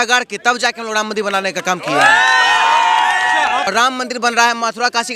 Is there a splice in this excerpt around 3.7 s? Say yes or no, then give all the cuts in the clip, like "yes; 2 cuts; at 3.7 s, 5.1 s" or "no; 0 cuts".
yes; 1 cut; at 3.7 s